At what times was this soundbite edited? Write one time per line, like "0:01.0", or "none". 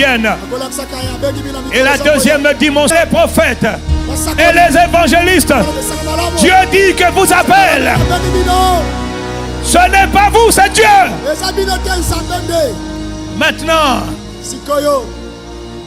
0:02.9